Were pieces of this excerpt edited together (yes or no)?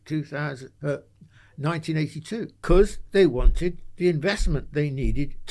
yes